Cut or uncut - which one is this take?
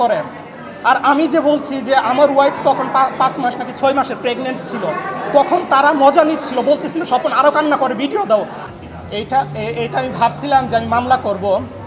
cut